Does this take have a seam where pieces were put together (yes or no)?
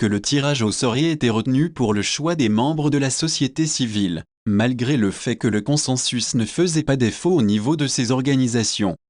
no